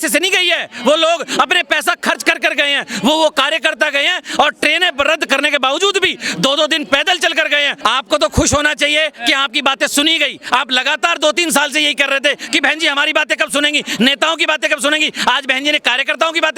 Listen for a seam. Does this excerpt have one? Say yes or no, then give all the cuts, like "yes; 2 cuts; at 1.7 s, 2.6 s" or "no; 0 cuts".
yes; 1 cut; at 7.8 s